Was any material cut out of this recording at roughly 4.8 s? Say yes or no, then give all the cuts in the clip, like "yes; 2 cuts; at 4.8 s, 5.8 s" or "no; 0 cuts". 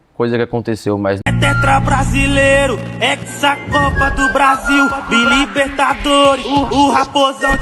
no; 1 cut; at 1.2 s